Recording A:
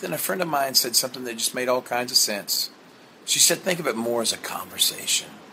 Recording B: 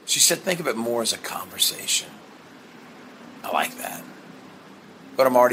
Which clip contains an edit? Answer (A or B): B